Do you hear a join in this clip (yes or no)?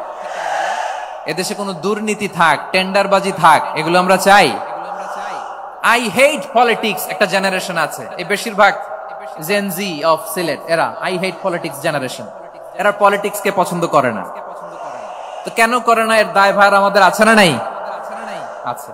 no